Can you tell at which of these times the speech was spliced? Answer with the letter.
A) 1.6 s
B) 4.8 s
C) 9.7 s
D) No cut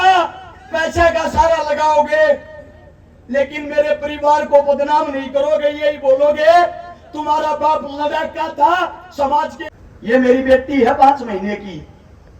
C